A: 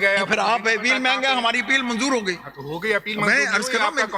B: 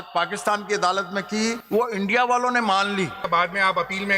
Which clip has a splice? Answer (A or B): B